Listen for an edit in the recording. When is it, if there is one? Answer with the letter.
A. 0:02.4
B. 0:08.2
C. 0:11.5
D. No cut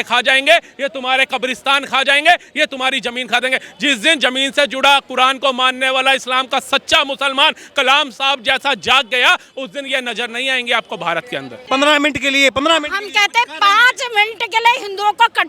C